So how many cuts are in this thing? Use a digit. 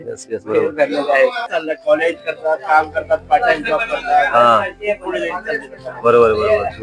1